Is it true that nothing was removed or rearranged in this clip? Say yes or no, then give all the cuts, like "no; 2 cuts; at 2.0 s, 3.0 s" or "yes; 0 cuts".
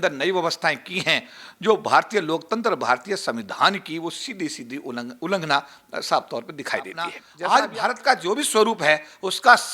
no; 1 cut; at 7.2 s